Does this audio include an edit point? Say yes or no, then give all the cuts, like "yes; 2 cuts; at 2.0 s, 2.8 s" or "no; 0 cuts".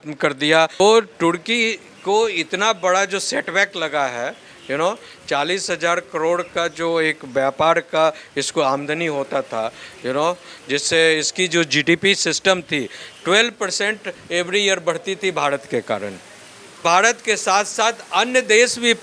yes; 2 cuts; at 0.8 s, 16.8 s